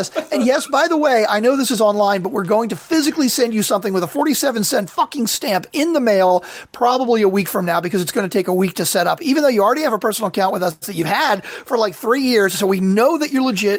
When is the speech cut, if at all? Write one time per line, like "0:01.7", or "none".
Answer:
none